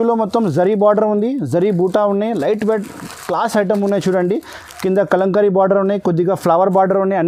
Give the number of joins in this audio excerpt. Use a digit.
0